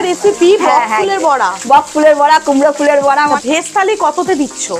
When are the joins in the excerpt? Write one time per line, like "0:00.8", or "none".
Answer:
0:03.4